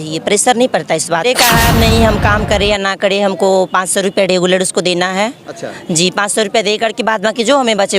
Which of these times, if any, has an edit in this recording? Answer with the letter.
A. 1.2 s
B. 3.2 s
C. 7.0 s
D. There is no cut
A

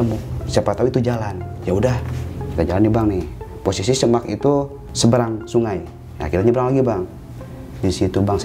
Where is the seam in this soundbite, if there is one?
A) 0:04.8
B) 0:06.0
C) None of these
A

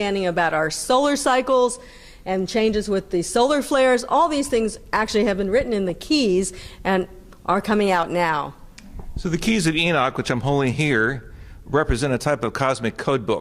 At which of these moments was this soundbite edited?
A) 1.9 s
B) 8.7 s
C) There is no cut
B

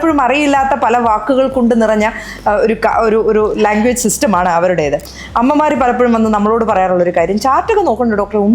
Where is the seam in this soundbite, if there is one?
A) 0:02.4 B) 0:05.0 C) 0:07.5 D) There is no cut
B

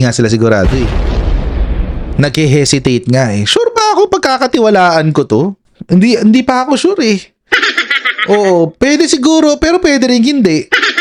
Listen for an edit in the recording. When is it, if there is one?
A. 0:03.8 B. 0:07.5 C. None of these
C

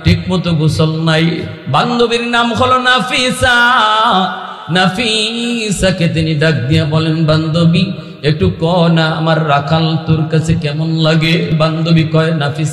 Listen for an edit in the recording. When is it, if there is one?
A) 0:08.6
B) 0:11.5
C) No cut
B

